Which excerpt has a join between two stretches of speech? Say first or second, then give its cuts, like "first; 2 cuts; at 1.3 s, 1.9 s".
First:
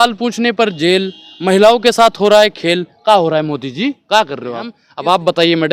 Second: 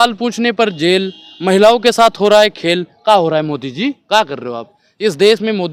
first; 1 cut; at 4.8 s